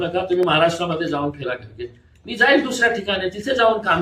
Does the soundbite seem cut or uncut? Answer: uncut